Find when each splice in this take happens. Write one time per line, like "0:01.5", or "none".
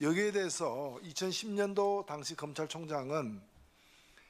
none